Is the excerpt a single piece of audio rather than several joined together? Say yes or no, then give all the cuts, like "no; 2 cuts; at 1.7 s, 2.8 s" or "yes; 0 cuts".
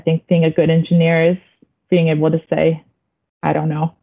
yes; 0 cuts